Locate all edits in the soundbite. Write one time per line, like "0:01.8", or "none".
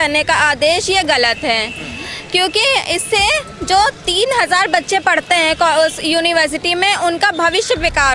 none